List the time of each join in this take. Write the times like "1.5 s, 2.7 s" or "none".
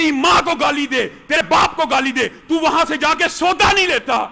1.4 s

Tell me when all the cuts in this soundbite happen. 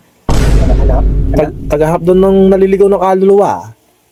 none

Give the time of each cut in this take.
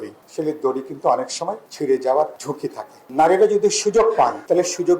2.9 s

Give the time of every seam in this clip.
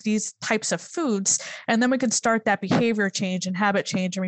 none

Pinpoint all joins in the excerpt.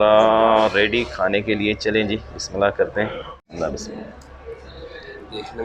3.4 s

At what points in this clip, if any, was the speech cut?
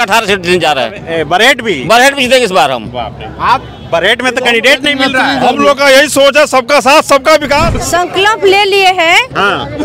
7.7 s

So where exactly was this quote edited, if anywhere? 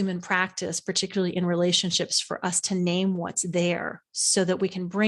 none

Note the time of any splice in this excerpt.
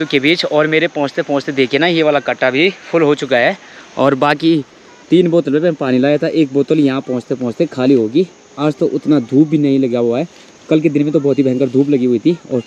none

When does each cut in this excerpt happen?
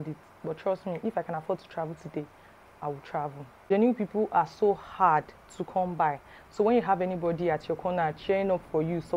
3.5 s

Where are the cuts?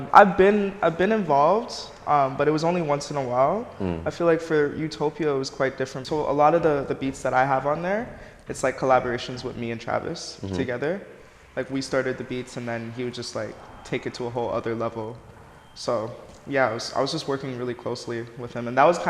6.0 s

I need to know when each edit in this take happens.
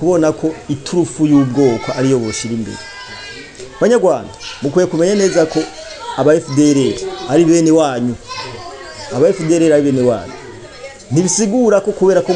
none

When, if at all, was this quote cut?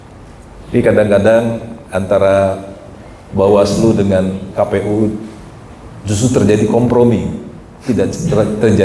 none

